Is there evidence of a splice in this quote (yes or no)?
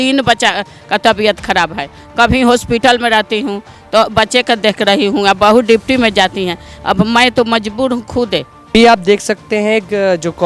no